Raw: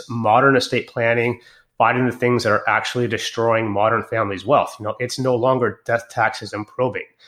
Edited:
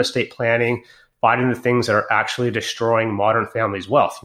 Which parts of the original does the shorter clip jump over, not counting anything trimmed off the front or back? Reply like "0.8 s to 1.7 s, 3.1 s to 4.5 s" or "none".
none